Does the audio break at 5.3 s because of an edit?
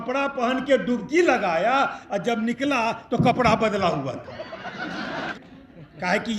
yes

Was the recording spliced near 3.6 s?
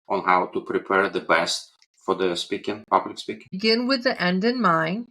yes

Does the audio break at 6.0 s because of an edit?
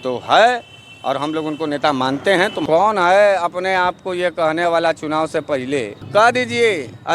yes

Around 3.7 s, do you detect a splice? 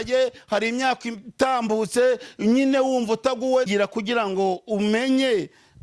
yes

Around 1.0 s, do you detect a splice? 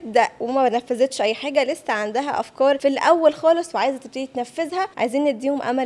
no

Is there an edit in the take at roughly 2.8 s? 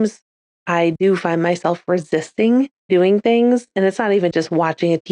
yes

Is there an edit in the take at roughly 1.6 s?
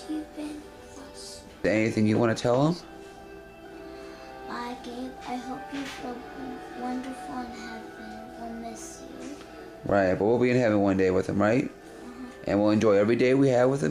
yes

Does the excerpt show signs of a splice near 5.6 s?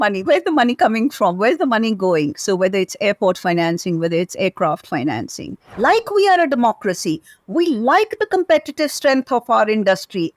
yes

